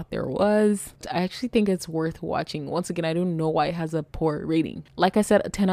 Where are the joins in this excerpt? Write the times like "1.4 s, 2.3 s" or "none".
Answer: 1.0 s, 4.8 s